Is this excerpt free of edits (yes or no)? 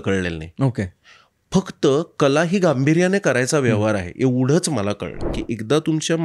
no